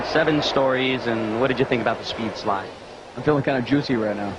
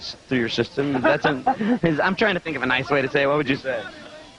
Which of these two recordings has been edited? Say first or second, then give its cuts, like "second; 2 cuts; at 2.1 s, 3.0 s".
first; 1 cut; at 1.9 s